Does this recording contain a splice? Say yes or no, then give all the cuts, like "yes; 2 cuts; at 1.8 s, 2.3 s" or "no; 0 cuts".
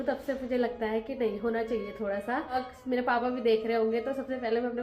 yes; 1 cut; at 2.7 s